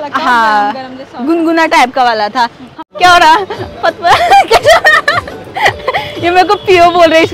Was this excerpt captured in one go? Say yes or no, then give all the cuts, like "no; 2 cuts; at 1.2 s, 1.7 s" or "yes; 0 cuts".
no; 1 cut; at 2.7 s